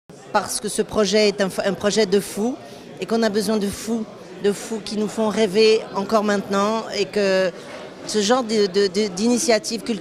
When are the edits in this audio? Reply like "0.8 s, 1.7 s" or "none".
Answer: 7.0 s